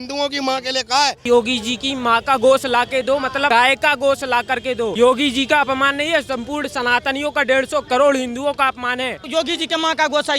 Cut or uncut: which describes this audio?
cut